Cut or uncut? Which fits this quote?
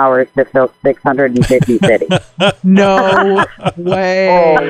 uncut